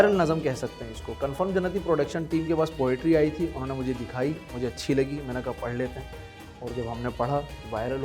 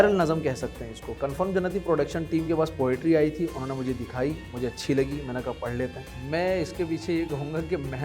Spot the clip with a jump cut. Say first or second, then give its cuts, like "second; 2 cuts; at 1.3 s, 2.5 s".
second; 1 cut; at 6.1 s